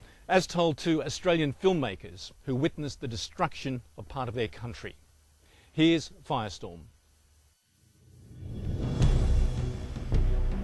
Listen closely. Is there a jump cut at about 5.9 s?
yes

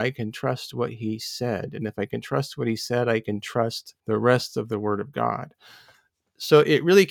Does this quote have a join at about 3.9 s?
yes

